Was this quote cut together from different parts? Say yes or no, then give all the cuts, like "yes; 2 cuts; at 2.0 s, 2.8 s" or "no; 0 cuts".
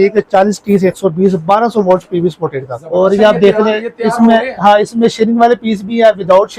yes; 1 cut; at 2.9 s